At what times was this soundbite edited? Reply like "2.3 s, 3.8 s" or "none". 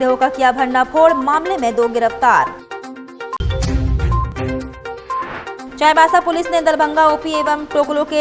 none